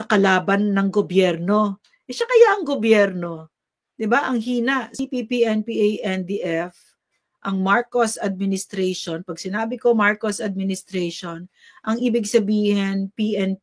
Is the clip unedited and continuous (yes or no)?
no